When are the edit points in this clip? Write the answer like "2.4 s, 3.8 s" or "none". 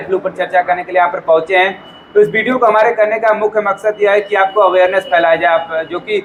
none